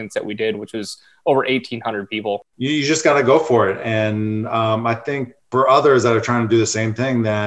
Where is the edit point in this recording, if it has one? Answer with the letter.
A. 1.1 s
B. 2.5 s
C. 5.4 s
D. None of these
B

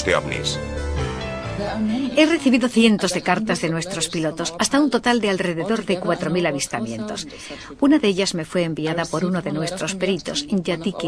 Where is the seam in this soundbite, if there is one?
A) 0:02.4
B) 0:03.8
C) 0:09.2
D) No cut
A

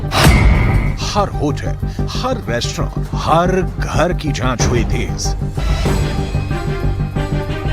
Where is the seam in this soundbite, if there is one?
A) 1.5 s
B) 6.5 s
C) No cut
A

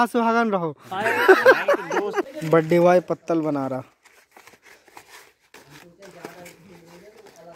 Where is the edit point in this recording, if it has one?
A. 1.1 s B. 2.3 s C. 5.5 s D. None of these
B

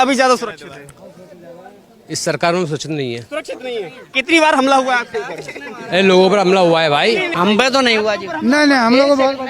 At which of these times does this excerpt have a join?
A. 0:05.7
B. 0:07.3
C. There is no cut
B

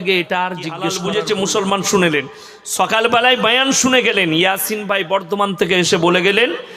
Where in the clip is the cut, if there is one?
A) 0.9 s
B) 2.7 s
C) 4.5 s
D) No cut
A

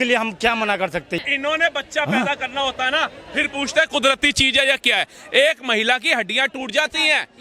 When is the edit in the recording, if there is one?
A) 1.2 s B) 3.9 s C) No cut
A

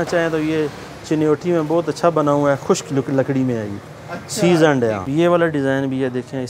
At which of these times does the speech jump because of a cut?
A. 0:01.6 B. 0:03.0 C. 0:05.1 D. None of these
C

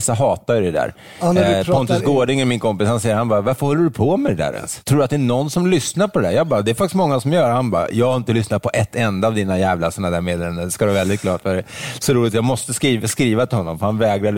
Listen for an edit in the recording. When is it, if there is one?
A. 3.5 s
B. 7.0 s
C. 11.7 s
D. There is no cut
D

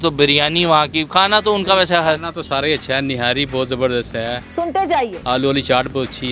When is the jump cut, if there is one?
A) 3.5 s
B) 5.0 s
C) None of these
B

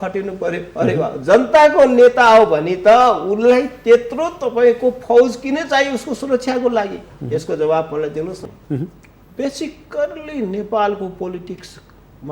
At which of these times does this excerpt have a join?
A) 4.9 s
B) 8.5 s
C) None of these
B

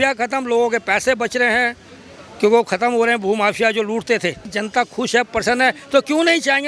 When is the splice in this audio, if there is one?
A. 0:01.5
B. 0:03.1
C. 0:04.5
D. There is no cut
C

